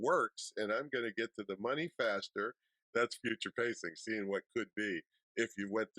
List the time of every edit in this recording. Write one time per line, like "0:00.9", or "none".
0:02.8